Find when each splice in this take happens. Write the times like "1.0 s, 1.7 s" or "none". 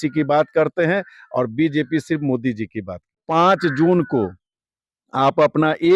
3.2 s